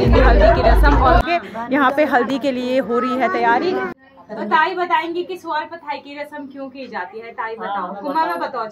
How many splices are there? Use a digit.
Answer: 2